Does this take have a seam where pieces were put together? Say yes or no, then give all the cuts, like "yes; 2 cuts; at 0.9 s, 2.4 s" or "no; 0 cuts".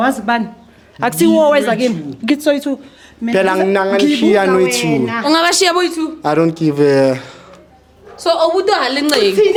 no; 0 cuts